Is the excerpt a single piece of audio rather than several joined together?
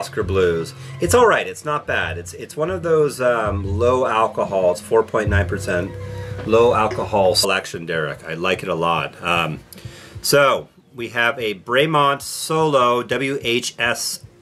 yes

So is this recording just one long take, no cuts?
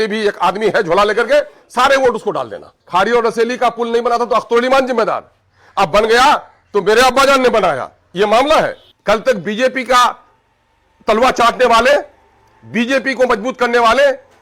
no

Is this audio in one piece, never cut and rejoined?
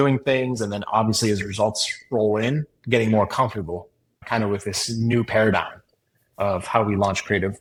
yes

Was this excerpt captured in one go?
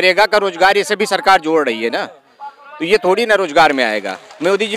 yes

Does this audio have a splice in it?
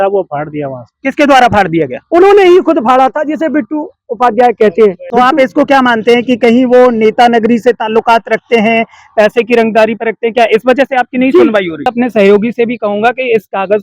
yes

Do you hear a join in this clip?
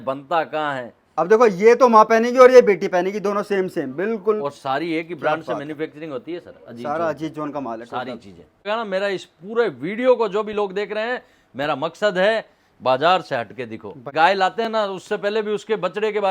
yes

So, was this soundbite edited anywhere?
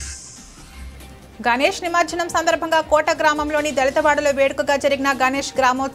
yes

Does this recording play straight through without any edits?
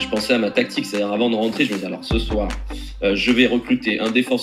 yes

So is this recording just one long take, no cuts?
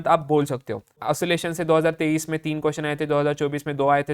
no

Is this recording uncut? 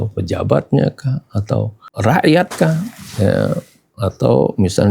no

